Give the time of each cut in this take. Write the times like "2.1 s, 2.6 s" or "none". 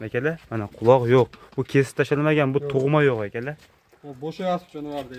none